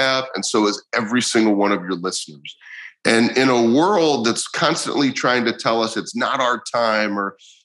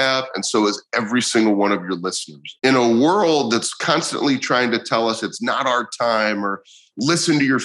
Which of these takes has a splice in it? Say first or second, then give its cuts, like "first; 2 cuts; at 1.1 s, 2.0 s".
second; 1 cut; at 2.6 s